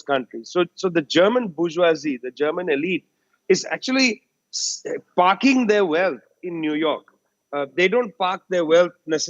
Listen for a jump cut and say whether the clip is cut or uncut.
uncut